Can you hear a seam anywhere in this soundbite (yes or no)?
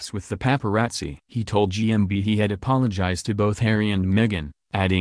yes